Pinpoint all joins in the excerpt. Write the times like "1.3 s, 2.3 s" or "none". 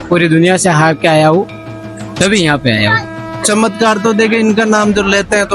3.4 s